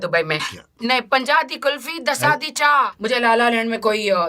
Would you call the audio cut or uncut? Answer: cut